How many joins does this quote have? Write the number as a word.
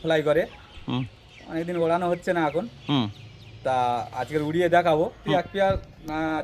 one